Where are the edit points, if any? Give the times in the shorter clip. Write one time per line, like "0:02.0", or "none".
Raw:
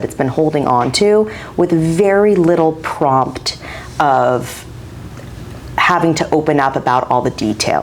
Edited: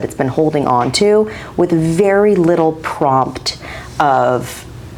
none